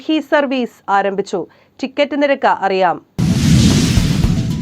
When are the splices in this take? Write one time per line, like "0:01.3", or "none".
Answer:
0:03.1

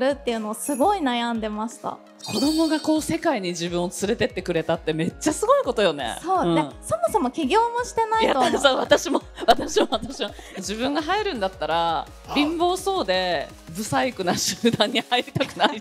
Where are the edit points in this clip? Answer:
0:02.1
0:10.5
0:13.5

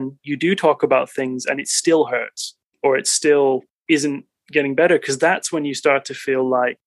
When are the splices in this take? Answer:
none

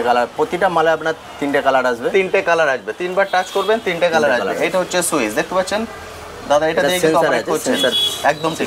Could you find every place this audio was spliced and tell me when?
none

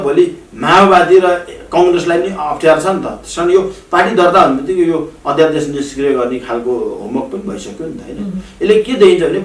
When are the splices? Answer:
none

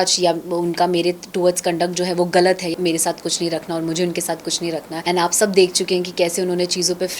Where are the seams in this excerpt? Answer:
0:02.7
0:04.9

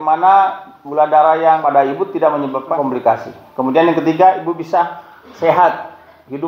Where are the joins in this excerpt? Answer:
0:01.6
0:02.8

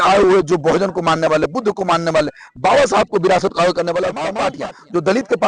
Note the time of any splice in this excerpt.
0:04.3

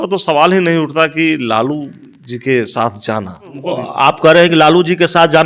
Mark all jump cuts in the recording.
0:03.5

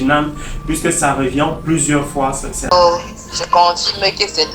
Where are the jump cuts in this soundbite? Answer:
0:02.7

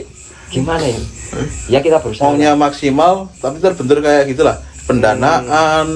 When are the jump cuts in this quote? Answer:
0:02.1

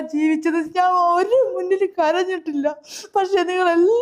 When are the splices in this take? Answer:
none

